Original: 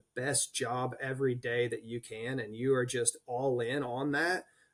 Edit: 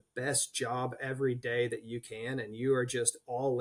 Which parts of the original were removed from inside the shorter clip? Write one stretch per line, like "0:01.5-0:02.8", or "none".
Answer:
none

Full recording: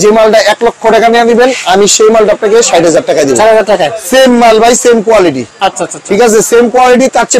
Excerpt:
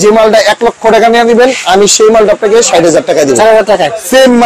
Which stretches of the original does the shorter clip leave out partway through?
none

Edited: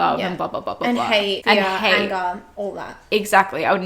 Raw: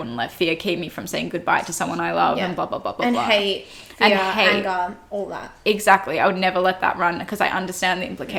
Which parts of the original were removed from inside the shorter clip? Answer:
0:03.6-0:03.9

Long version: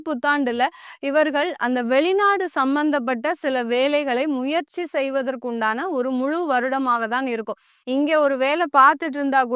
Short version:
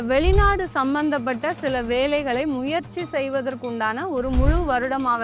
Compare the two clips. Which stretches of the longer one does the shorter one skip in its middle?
none

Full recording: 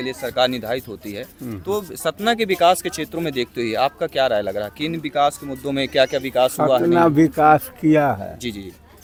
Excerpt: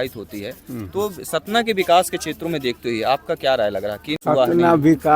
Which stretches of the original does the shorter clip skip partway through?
0:04.9-0:06.5

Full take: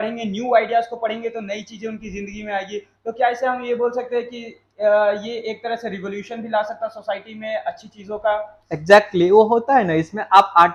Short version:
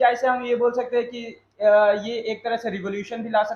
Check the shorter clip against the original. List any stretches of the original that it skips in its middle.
none

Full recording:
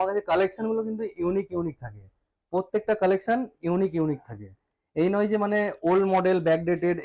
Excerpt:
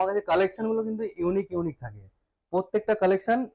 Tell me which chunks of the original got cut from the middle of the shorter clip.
none

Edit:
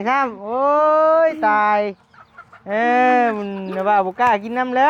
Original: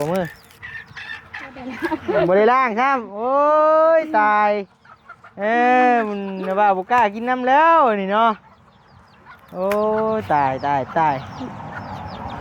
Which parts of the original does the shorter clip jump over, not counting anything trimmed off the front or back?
none

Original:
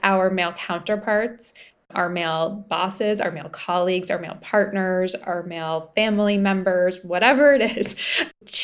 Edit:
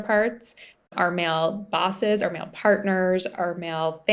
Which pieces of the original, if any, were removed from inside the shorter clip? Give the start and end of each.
0:03.2-0:04.1

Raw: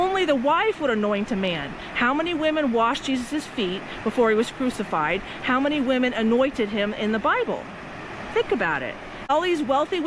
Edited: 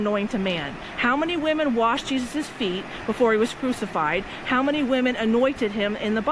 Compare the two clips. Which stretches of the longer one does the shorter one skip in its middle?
none

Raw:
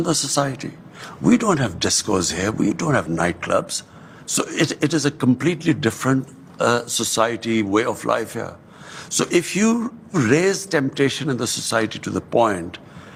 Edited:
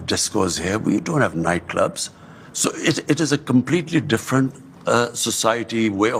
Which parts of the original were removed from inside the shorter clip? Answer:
none

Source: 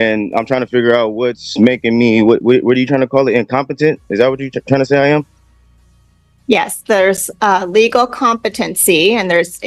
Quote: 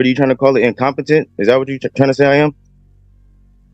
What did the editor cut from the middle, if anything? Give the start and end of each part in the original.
none

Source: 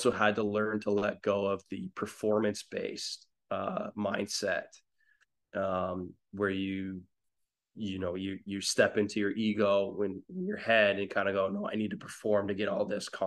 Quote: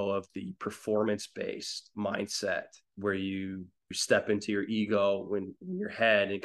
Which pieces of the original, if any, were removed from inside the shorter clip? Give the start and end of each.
0:03.3-0:03.9
0:04.8-0:06.2
0:07.3-0:08.7

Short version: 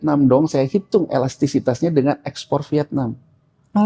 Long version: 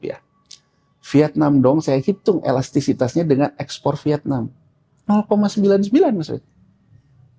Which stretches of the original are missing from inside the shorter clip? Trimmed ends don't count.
none

